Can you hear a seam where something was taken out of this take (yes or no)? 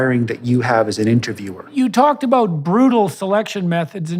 yes